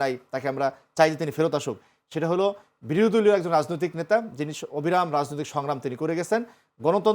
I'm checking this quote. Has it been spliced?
no; 0 cuts

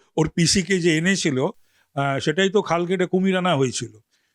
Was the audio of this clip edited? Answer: no; 0 cuts

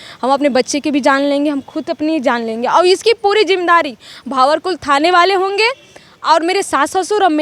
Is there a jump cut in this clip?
no; 0 cuts

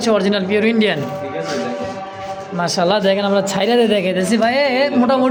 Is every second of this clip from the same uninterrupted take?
yes; 0 cuts

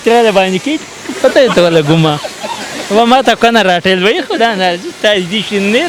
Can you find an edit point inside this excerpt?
no; 0 cuts

